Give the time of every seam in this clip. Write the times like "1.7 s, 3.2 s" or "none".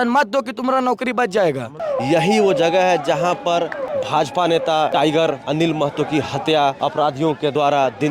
1.7 s, 3.8 s, 5.0 s, 7.1 s